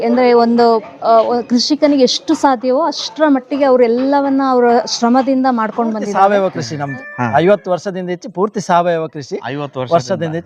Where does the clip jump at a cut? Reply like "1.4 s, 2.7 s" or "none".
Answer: 6.1 s